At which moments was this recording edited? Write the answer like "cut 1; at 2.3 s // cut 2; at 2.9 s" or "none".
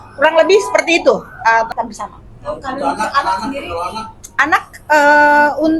cut 1; at 1.7 s